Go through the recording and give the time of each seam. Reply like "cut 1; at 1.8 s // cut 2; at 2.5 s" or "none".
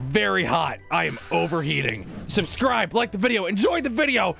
cut 1; at 1.9 s